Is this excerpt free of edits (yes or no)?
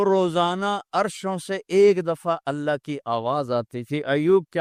yes